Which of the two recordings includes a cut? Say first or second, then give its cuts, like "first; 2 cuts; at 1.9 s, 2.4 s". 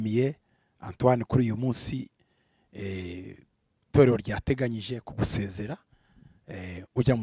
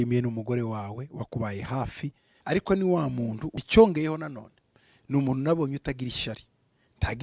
second; 2 cuts; at 2.3 s, 3.5 s